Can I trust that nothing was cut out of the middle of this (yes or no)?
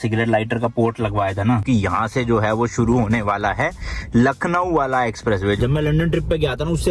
no